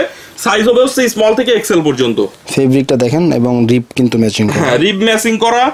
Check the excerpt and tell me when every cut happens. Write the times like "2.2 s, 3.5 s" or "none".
none